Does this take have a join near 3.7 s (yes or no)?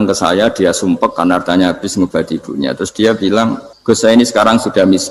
yes